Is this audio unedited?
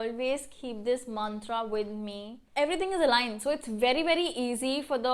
no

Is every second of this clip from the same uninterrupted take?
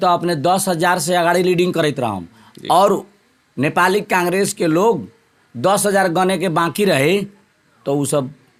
yes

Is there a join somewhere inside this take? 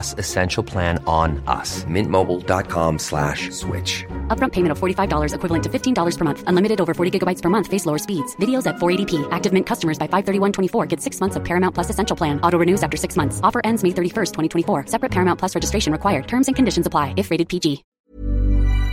yes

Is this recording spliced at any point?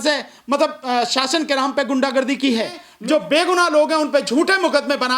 yes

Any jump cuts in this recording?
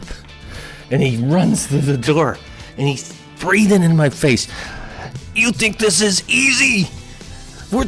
yes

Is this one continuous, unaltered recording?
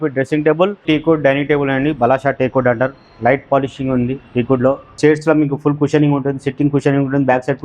no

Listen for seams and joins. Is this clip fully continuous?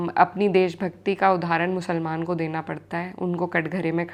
yes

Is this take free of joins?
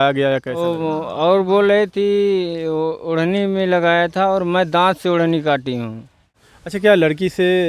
no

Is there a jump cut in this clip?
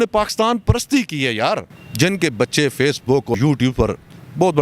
yes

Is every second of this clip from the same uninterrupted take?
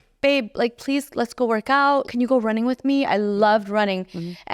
no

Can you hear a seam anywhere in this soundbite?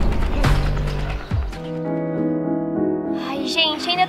yes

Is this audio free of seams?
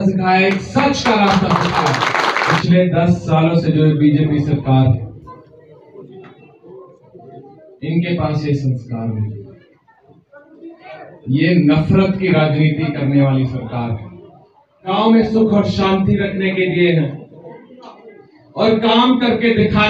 no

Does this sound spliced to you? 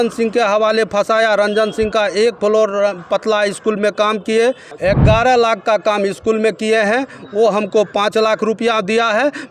yes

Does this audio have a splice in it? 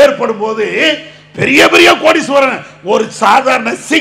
no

